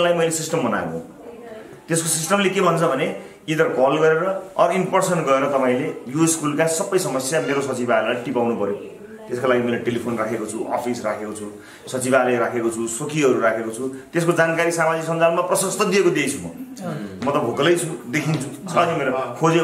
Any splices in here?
no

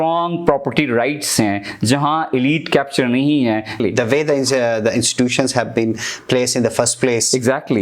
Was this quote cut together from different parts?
yes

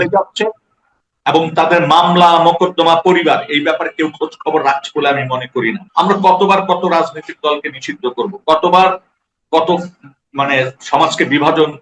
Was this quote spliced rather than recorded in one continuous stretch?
yes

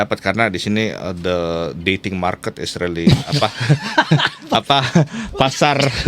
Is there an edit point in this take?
no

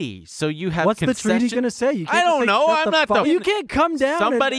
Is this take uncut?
no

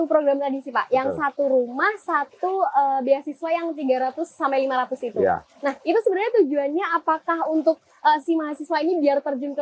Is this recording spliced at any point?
no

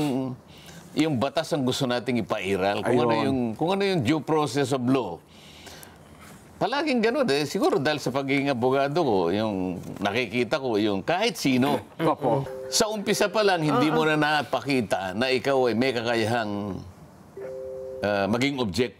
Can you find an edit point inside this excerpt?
yes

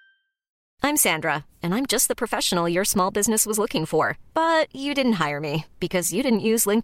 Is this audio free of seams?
yes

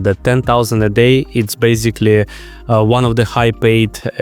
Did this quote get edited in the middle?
no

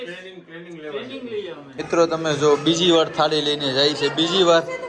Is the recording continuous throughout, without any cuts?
no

